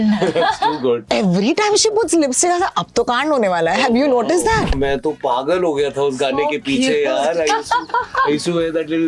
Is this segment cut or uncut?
cut